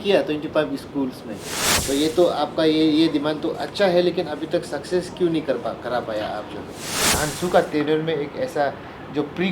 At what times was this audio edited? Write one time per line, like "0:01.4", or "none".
0:01.7
0:07.2